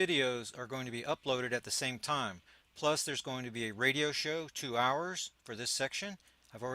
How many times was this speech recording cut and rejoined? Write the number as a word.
one